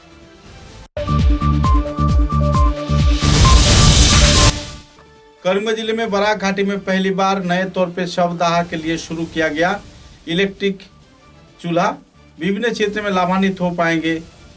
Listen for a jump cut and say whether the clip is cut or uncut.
uncut